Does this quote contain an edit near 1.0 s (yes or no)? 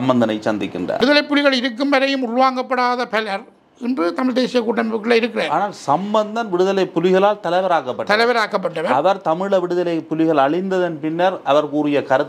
yes